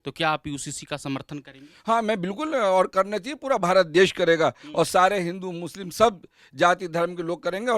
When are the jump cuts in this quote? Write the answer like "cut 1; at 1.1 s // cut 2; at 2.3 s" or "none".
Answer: none